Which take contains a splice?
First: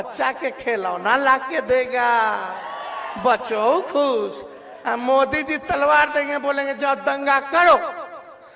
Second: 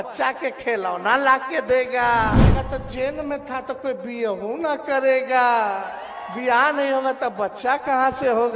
second; 1 cut; at 2.6 s

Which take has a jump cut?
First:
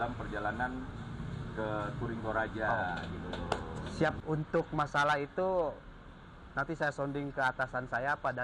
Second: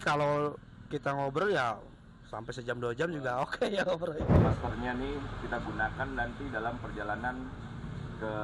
second; 1 cut; at 4.3 s

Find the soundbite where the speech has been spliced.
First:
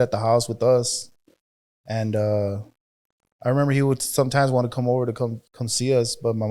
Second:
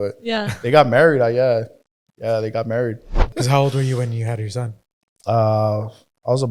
second; 1 cut; at 3.3 s

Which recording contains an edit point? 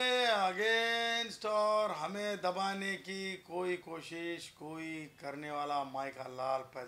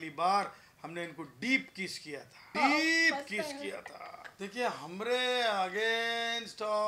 second; 2 cuts; at 2.5 s, 4.2 s

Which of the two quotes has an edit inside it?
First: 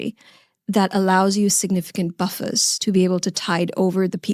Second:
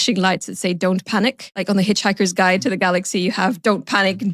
second; 1 cut; at 1.5 s

